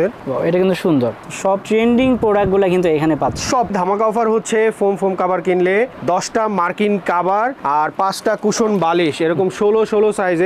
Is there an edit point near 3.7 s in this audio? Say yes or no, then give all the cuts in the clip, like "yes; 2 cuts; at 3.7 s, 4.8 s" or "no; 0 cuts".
yes; 1 cut; at 3.7 s